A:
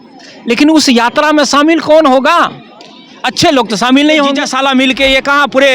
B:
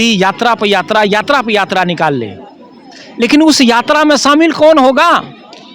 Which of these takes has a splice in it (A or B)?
A